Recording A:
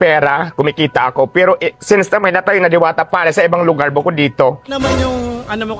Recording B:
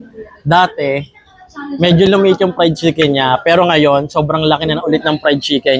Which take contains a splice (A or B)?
A